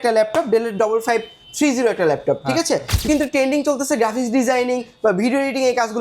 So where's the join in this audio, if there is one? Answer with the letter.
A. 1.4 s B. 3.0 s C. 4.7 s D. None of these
B